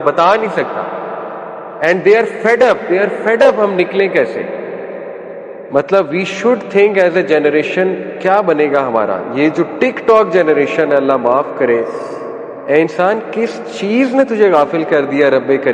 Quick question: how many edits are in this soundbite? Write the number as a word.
one